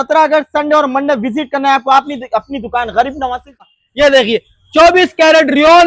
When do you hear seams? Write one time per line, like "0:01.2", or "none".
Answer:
0:03.7